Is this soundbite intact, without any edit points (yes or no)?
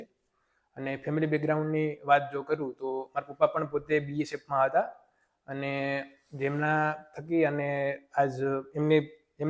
yes